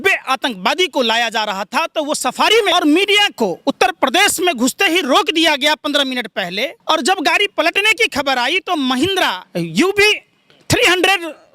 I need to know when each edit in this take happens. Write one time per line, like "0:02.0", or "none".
0:02.7
0:06.8
0:09.4